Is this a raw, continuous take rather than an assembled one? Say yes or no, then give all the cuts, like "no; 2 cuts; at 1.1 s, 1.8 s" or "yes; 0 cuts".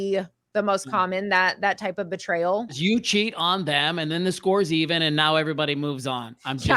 no; 1 cut; at 2.8 s